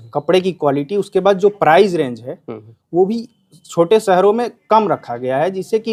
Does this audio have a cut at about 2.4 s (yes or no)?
no